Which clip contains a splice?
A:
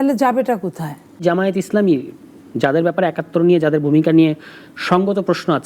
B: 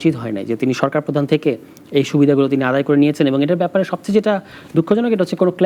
A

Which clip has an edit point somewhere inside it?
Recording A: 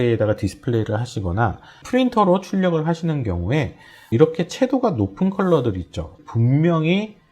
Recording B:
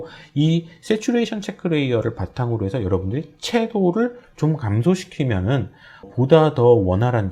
A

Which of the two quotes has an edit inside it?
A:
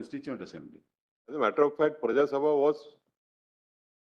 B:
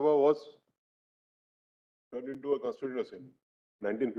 A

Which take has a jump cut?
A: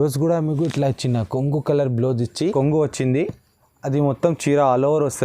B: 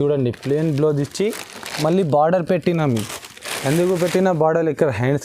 A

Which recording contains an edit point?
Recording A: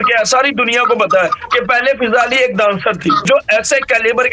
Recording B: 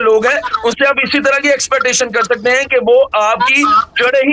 A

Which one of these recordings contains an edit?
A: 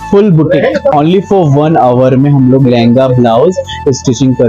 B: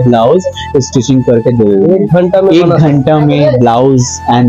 A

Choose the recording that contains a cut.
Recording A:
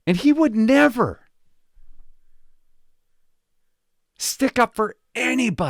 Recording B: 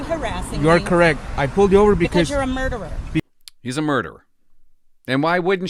B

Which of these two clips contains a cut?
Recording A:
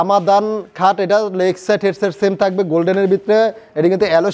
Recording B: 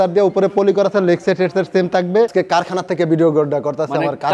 B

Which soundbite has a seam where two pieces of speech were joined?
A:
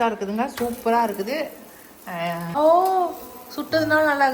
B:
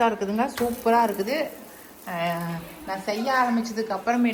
A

